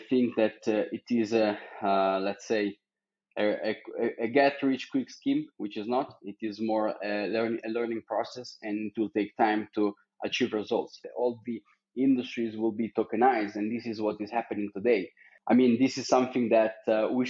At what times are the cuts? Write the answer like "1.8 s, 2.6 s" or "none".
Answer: 11.0 s, 15.3 s